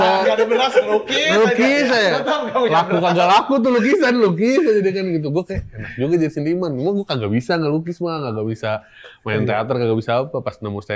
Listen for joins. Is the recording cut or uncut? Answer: uncut